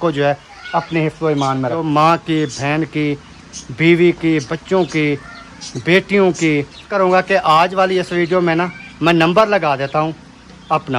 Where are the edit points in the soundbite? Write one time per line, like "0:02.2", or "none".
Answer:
0:01.8
0:06.9